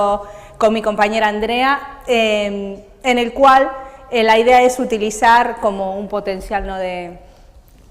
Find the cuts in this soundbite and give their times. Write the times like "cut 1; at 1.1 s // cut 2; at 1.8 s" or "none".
cut 1; at 6.8 s